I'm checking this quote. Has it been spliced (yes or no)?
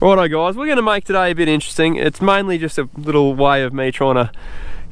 no